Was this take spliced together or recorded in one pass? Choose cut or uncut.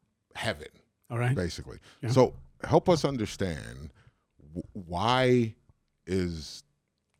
uncut